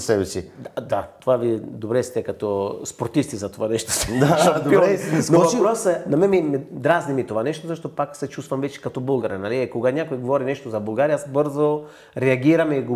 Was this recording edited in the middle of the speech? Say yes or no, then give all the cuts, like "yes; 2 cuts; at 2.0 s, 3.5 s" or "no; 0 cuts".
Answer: no; 0 cuts